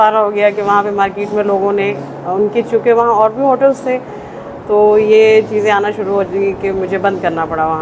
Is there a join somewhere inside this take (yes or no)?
no